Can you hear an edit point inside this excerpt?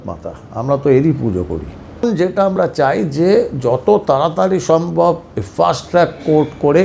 yes; 1 cut; at 2.0 s

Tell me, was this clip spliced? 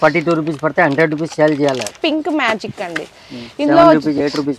yes; 1 cut; at 2.0 s

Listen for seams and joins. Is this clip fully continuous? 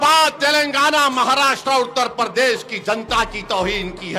yes; 0 cuts

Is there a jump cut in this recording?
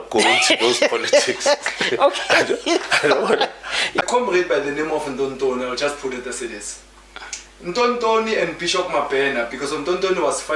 yes; 1 cut; at 4.0 s

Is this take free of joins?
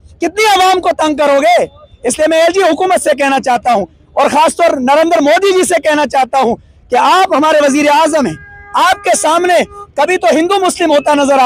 yes; 0 cuts

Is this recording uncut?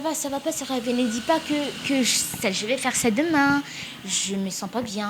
yes; 0 cuts

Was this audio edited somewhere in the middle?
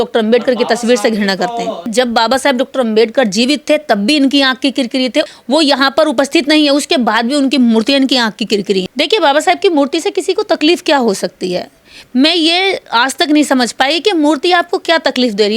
yes; 2 cuts; at 1.9 s, 8.9 s

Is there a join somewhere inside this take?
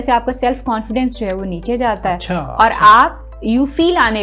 no; 0 cuts

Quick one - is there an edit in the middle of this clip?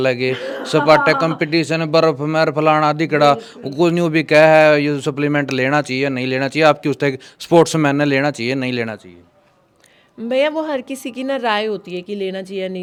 no; 0 cuts

